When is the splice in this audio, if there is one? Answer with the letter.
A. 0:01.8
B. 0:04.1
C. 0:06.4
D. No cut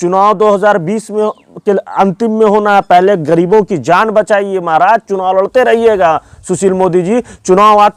D